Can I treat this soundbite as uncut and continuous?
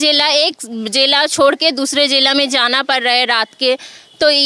yes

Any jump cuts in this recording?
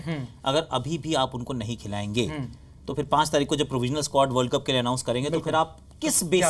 no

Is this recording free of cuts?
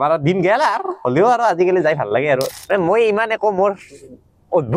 no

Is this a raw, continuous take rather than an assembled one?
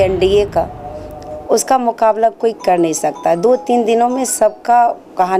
yes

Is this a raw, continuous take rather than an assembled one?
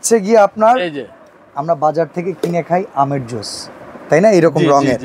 yes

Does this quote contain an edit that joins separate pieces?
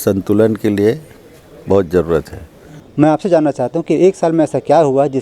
yes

